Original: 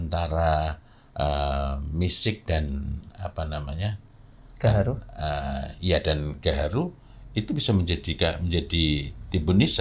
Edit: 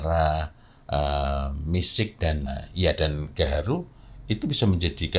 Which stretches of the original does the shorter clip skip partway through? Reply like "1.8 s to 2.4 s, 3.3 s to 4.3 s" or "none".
2.7 s to 5.5 s